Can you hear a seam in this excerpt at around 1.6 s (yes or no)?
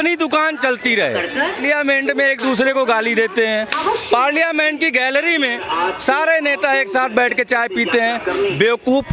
yes